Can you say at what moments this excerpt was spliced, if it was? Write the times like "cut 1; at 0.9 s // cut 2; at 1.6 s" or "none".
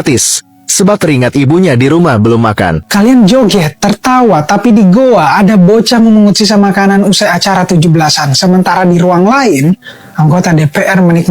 cut 1; at 2.9 s